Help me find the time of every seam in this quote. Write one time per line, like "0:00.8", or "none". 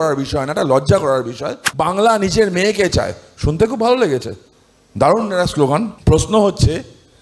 0:01.6
0:05.9